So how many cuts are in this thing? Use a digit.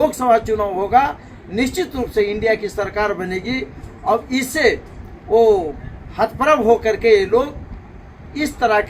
0